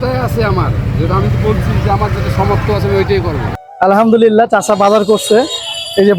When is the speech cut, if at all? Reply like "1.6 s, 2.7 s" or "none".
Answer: 3.6 s